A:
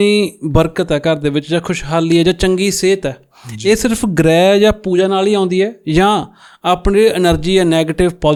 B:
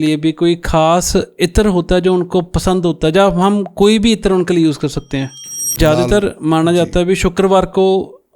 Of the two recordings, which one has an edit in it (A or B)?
B